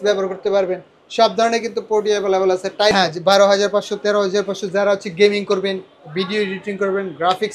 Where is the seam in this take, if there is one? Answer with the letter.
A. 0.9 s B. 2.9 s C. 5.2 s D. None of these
B